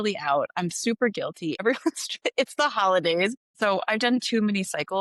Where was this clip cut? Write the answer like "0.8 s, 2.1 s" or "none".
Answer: 1.6 s, 3.4 s